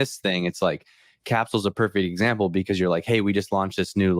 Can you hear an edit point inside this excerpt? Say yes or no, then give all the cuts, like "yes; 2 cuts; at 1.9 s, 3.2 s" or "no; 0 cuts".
no; 0 cuts